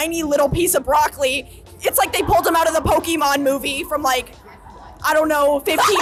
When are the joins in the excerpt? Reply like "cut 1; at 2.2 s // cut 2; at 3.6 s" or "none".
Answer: none